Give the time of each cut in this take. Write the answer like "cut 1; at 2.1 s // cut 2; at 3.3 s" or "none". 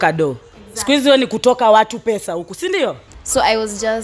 cut 1; at 3.1 s